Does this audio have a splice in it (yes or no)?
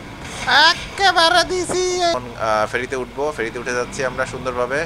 yes